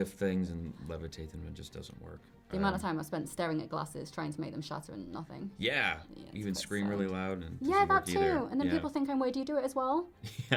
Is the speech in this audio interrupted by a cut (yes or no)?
no